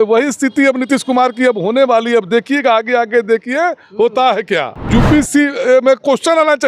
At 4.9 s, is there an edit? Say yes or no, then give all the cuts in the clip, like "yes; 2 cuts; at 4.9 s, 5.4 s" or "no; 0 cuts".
yes; 1 cut; at 4.9 s